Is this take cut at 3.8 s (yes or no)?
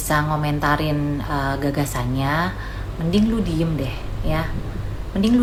no